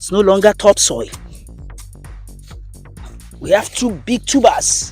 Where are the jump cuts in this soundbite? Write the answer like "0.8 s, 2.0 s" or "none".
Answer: 1.1 s, 3.4 s